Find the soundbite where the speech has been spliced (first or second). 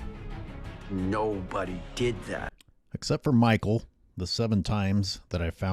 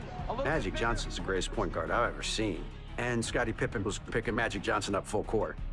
first